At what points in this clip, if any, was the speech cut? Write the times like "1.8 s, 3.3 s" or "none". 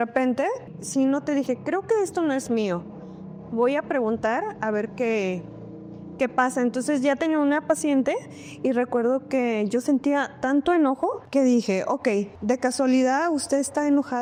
none